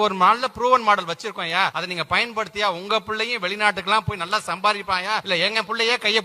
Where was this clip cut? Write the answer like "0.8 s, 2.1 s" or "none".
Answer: 1.8 s, 5.2 s